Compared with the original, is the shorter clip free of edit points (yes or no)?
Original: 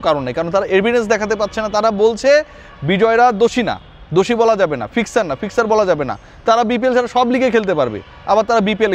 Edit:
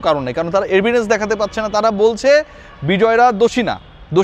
yes